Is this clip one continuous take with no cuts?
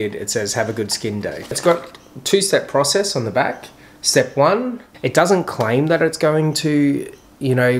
no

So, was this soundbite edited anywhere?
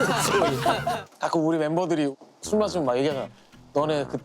yes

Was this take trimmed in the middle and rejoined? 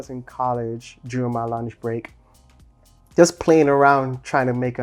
no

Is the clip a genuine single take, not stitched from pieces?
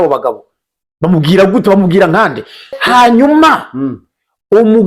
no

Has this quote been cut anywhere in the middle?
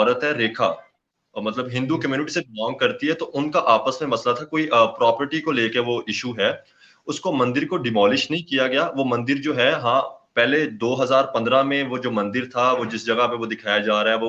no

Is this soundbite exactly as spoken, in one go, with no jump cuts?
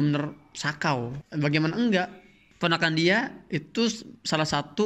no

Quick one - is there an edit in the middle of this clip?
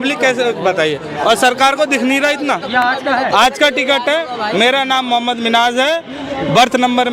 no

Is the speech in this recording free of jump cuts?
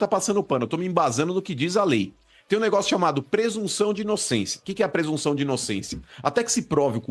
yes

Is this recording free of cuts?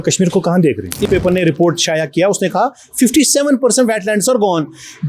no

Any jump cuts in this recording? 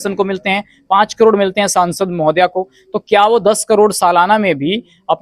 no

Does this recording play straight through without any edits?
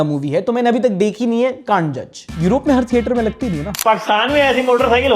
no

